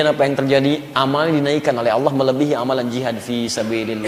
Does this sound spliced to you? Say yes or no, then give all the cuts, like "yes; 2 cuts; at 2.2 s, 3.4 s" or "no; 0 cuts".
no; 0 cuts